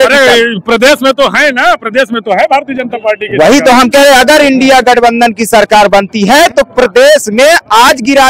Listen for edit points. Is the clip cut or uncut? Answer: uncut